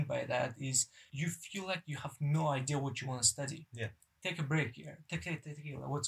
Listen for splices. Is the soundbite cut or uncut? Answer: cut